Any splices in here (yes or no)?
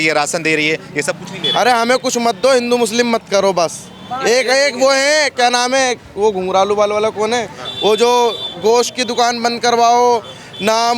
no